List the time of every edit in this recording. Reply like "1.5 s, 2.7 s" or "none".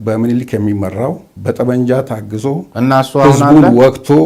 none